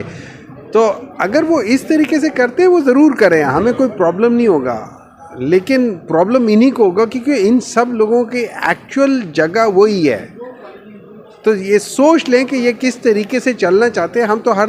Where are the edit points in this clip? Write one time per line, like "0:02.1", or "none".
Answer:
none